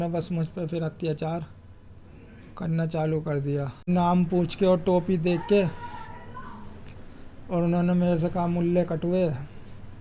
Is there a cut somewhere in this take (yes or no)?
yes